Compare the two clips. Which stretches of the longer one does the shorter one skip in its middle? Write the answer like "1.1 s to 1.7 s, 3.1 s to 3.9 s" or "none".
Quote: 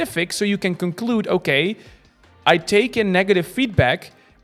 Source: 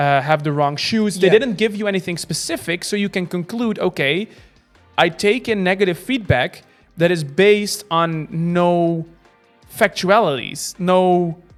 none

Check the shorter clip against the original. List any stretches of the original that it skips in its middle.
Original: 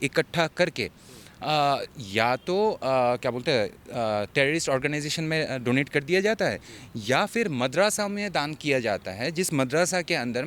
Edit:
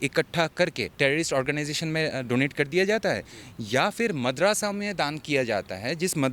0.9 s to 4.3 s

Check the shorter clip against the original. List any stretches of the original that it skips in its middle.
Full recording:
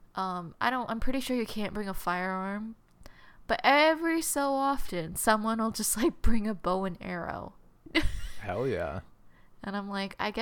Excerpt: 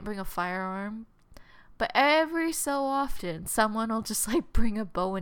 none

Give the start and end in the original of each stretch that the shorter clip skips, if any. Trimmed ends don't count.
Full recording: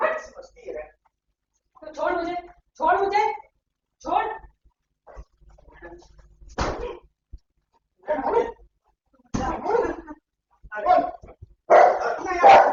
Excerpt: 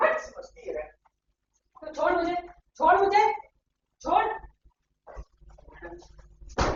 none

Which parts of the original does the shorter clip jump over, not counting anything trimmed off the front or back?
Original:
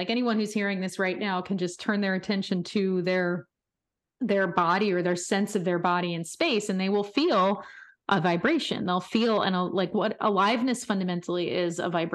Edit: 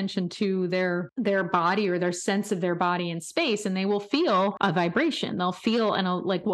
3.4 s to 4.1 s, 7.6 s to 8.0 s

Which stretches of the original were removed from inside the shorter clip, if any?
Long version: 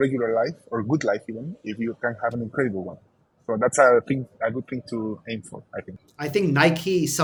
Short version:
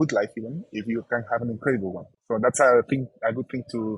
3.0 s to 3.3 s

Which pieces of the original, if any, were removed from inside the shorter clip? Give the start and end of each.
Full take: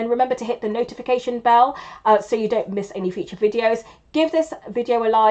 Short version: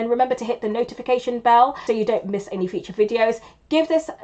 1.8 s to 2.2 s

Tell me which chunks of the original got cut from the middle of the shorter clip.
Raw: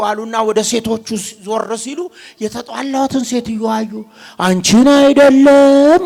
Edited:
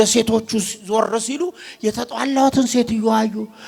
none

